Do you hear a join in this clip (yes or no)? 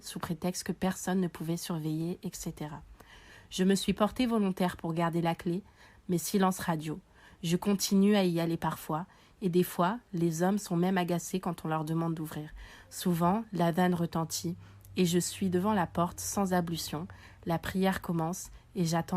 no